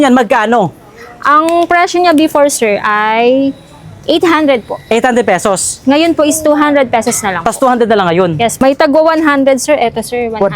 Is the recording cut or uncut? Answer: cut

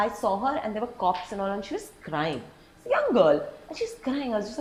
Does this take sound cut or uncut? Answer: uncut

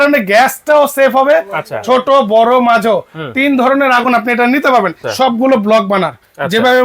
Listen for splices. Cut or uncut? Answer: cut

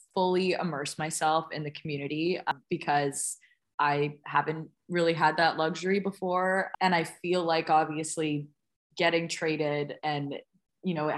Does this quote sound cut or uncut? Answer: cut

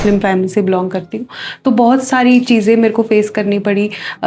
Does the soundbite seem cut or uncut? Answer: uncut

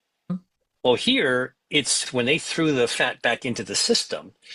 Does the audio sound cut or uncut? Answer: cut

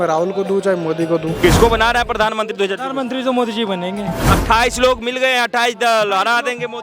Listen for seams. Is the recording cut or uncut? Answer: cut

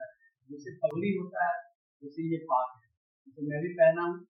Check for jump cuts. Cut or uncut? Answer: uncut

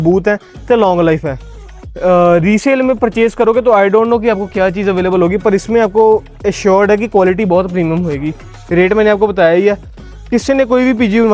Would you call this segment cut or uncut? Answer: uncut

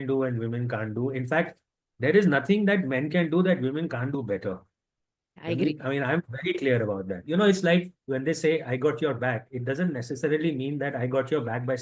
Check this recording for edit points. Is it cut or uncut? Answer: cut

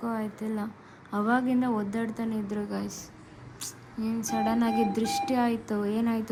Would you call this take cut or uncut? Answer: uncut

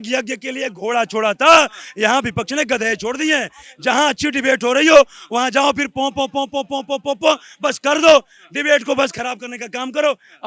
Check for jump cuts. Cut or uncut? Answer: uncut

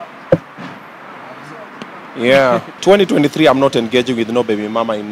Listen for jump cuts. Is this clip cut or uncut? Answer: cut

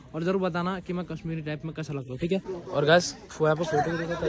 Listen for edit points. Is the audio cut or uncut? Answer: cut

